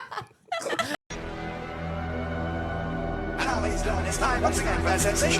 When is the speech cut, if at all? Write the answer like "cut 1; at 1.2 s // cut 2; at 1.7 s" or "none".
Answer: cut 1; at 1.0 s